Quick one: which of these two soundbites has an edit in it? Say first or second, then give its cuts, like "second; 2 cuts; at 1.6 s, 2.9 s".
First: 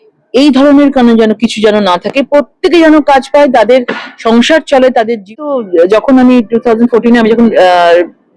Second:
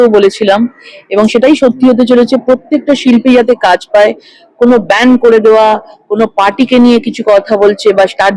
first; 1 cut; at 5.4 s